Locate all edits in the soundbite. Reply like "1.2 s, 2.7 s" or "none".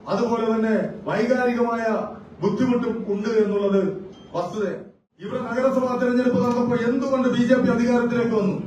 5.4 s